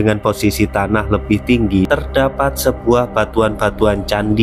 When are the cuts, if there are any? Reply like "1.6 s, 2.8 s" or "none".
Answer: 1.9 s